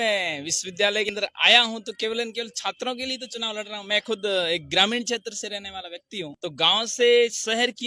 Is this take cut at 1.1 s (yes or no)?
yes